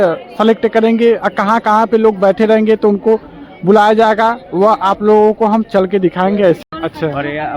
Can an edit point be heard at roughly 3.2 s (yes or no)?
no